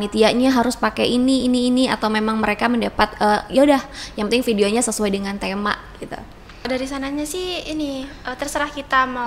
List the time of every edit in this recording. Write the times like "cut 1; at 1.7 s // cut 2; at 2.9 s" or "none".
cut 1; at 6.7 s